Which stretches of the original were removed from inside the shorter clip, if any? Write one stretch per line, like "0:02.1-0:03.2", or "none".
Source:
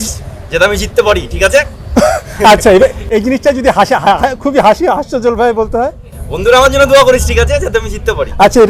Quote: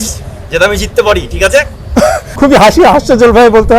0:02.3-0:04.4